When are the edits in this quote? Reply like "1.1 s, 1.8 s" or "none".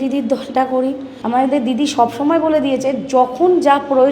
1.1 s